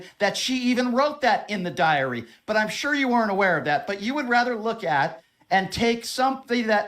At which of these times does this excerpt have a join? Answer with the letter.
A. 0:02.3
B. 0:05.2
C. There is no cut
A